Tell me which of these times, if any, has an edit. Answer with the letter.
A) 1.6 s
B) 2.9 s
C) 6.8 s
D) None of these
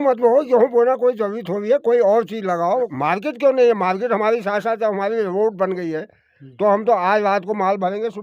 B